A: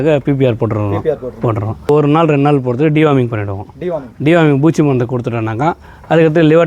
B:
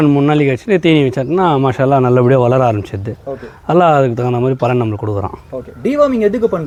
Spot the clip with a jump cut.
A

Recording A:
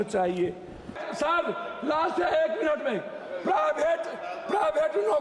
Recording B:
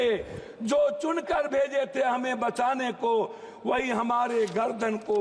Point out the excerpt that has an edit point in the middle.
A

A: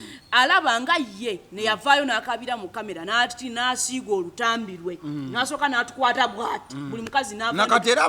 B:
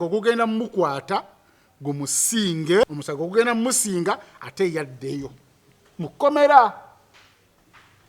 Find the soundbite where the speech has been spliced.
B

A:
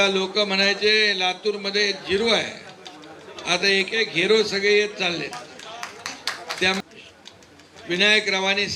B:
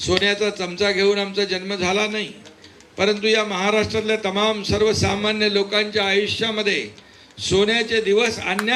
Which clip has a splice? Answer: A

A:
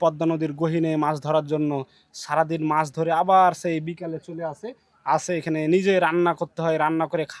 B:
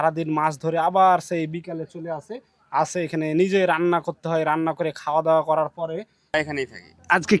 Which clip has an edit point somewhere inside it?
B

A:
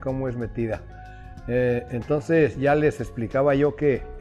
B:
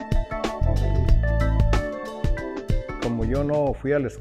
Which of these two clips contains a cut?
B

